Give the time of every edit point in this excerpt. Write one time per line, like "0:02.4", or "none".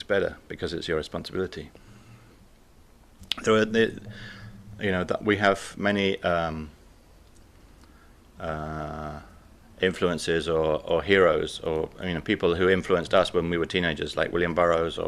0:07.4